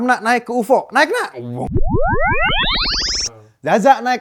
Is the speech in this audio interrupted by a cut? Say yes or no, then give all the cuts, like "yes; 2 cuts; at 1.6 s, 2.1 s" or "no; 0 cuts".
yes; 1 cut; at 3.2 s